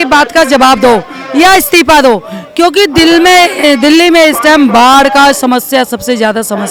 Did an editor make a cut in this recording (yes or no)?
no